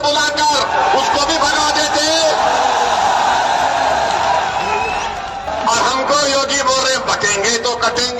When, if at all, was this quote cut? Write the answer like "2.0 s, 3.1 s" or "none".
5.5 s